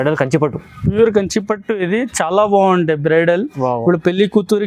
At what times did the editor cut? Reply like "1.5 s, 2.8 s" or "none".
none